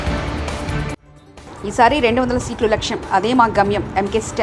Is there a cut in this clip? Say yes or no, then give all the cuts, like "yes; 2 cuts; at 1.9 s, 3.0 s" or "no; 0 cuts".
no; 0 cuts